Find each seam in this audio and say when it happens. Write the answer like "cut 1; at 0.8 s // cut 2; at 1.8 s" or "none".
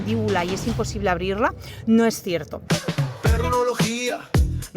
cut 1; at 2.6 s